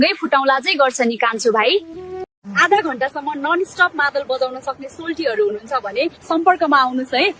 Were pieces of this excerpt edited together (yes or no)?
yes